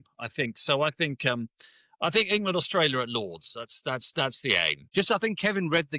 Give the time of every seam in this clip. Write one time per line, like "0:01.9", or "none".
0:04.8